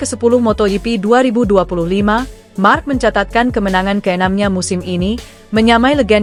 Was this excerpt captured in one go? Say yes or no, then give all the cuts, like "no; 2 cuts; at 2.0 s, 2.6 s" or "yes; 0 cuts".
yes; 0 cuts